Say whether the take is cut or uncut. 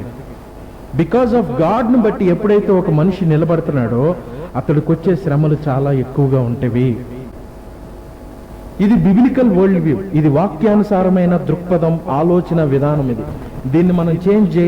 uncut